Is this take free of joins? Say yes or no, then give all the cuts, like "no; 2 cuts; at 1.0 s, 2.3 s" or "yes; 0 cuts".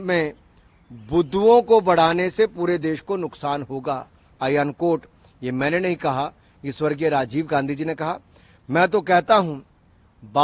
yes; 0 cuts